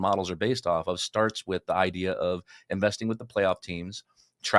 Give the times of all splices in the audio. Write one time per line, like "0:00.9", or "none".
none